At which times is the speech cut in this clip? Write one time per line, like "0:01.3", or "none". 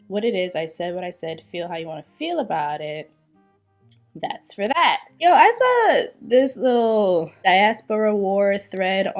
0:05.1
0:07.3